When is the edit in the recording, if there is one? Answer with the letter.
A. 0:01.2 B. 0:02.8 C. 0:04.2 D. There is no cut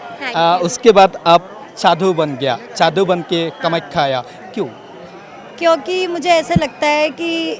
D